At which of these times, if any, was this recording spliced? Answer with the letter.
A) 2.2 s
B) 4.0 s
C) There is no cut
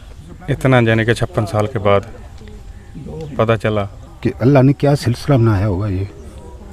B